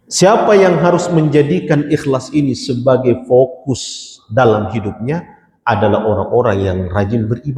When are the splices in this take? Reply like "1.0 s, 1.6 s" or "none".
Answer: none